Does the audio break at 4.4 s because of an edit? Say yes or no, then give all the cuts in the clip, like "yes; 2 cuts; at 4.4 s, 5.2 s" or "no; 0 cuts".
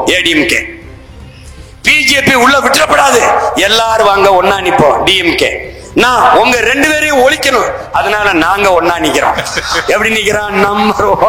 no; 0 cuts